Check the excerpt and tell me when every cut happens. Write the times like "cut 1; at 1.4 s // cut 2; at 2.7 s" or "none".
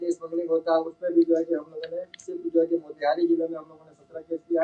none